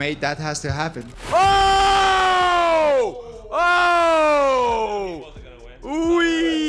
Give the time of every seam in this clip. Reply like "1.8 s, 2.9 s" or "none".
1.1 s